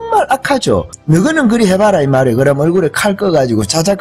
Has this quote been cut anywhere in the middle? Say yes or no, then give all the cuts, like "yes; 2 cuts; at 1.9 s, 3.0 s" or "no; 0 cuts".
yes; 1 cut; at 0.9 s